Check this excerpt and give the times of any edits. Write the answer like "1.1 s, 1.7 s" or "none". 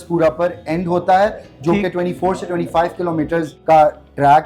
3.5 s